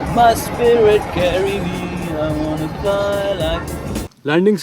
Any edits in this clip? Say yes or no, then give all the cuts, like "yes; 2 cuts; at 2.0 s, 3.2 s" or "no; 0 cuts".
yes; 1 cut; at 3.7 s